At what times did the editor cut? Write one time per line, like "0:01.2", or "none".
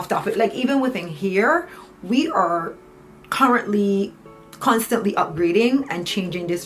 none